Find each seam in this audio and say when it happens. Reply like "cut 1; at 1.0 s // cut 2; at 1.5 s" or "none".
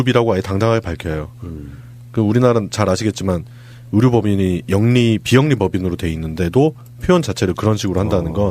cut 1; at 3.1 s